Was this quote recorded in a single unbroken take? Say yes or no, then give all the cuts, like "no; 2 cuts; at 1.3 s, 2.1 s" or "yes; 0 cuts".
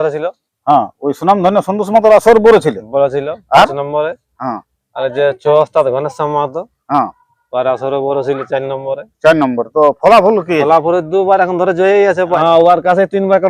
no; 1 cut; at 12.3 s